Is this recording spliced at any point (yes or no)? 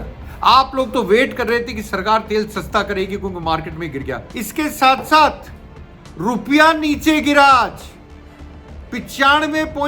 yes